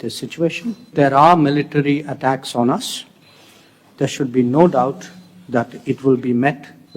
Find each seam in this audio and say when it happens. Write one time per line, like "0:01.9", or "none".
0:00.9